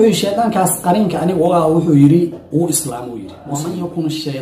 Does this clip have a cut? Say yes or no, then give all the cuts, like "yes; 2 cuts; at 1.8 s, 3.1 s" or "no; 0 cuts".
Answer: yes; 1 cut; at 3.3 s